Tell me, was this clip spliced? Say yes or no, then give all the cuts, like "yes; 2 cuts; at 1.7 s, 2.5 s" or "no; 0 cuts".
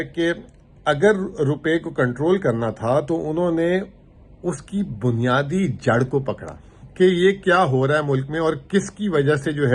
no; 0 cuts